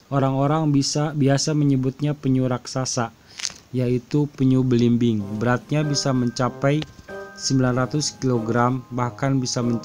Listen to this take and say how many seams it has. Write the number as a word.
zero